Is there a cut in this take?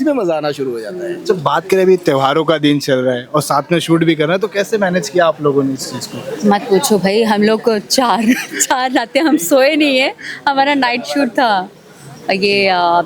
no; 0 cuts

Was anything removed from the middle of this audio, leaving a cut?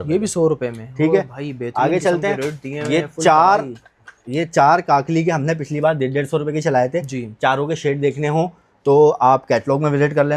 no; 0 cuts

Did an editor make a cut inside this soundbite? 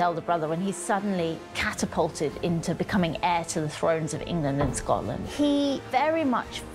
yes; 2 cuts; at 5.2 s, 5.8 s

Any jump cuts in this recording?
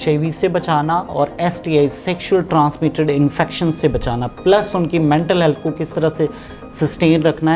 no; 0 cuts

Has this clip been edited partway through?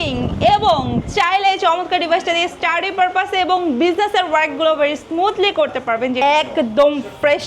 yes; 1 cut; at 6.2 s

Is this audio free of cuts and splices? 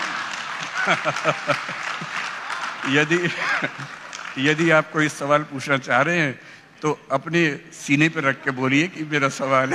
yes; 0 cuts

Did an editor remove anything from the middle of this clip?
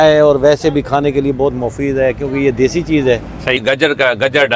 yes; 1 cut; at 3.6 s

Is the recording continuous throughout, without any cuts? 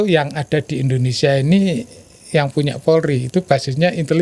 yes; 0 cuts

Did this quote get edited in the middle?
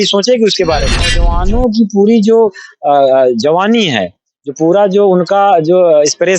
yes; 1 cut; at 1.3 s

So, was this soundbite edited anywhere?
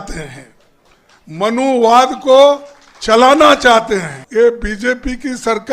yes; 1 cut; at 4.2 s

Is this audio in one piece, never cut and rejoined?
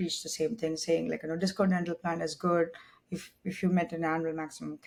yes; 0 cuts

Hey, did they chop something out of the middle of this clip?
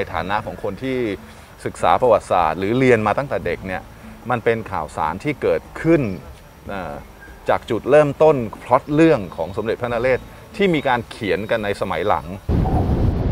yes; 1 cut; at 12.4 s

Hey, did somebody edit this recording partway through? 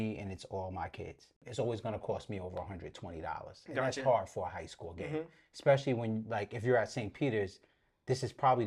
yes; 1 cut; at 1.4 s

